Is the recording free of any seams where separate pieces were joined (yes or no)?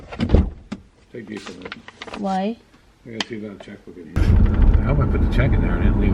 no